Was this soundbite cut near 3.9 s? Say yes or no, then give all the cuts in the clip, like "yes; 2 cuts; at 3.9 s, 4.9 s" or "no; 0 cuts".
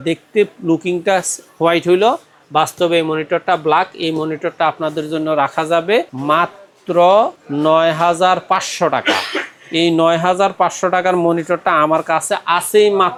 no; 0 cuts